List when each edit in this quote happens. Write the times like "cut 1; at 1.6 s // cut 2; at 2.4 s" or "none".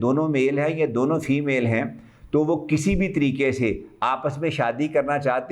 none